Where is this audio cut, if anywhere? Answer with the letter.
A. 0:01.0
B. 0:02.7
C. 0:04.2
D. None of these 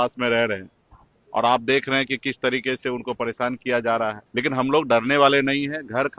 C